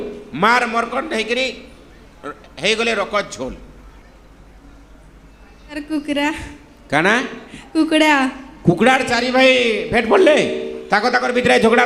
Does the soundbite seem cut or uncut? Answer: cut